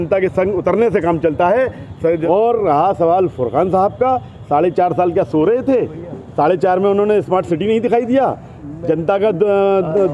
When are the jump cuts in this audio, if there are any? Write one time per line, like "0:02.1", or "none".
0:02.2